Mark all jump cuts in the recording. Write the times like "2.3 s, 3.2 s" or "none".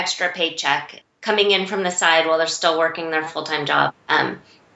1.0 s

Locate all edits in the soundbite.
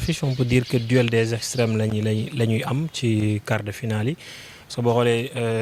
none

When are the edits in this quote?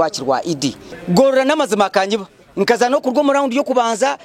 1.1 s

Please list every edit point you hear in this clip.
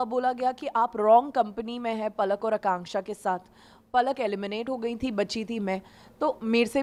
none

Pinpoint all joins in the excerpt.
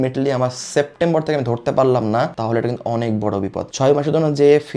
3.7 s

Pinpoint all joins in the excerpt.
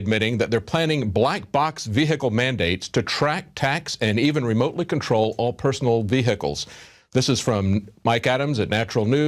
2.4 s

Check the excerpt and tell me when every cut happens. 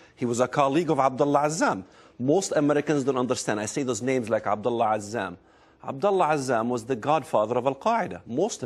none

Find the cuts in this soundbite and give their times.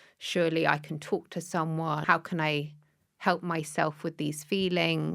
2.0 s

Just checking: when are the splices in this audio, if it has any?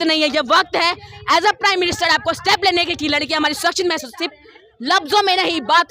none

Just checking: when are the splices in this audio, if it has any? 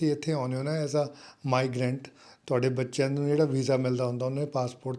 none

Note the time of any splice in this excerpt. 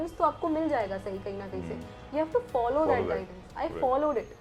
none

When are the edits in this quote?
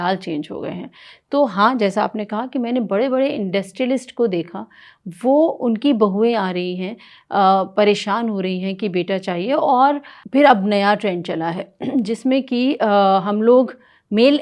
10.1 s

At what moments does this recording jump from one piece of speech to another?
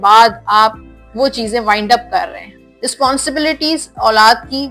2.4 s

